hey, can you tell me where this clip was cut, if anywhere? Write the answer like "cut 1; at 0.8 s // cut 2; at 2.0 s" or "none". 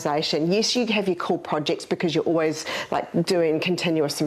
none